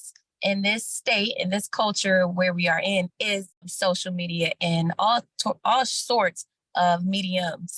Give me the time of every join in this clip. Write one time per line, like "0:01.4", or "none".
0:03.7